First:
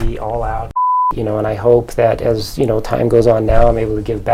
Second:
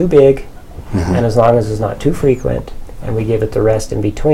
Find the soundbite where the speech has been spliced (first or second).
first